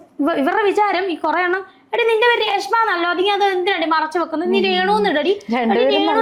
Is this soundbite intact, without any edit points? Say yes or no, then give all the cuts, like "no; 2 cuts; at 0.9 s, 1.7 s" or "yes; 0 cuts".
yes; 0 cuts